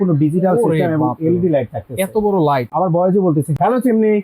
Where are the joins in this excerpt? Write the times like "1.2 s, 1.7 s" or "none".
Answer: 2.7 s